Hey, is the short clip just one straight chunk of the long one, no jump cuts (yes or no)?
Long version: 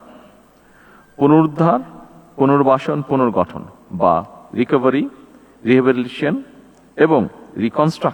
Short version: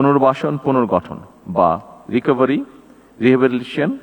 yes